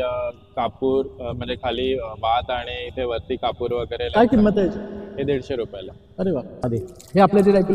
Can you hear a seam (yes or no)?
yes